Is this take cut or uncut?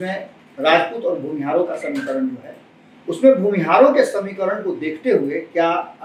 uncut